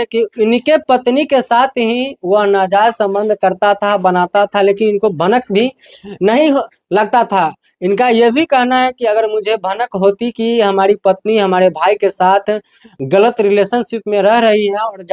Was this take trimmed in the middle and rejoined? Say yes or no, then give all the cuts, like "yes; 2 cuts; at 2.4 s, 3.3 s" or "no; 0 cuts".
no; 0 cuts